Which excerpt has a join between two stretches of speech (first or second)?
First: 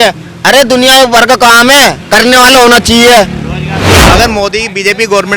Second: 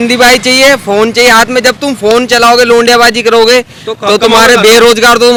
first